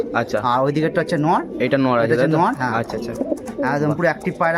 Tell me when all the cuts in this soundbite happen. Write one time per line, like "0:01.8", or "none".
none